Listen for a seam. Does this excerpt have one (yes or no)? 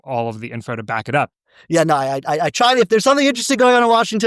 no